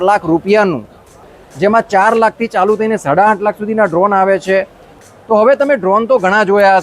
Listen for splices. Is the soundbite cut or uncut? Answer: cut